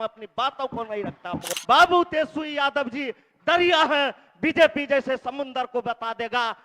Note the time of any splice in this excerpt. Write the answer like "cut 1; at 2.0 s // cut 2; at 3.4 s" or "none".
cut 1; at 1.5 s